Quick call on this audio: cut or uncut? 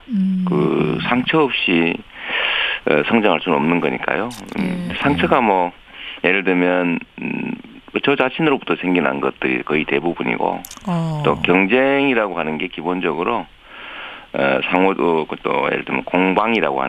uncut